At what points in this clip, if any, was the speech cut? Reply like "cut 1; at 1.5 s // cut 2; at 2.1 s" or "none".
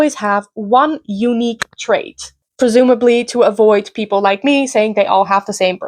none